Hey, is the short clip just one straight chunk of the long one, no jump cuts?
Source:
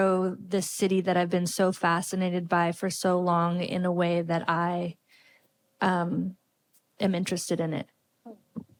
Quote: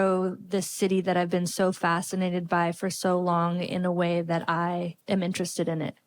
no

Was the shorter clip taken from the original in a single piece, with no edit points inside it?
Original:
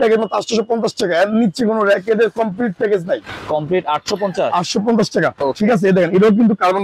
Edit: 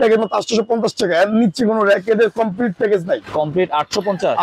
no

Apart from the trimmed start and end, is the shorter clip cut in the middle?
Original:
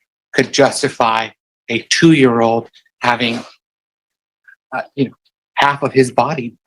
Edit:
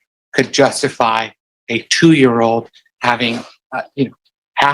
yes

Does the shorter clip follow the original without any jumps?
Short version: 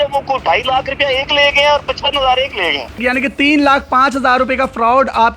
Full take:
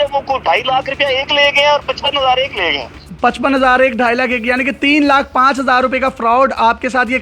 no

